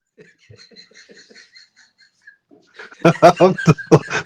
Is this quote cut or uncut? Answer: uncut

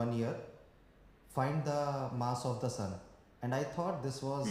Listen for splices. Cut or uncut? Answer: uncut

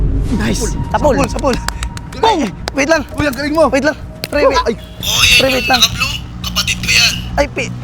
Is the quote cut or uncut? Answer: uncut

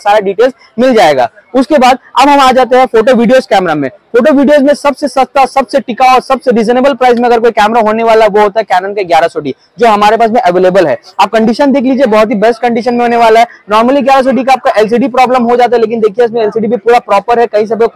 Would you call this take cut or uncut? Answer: uncut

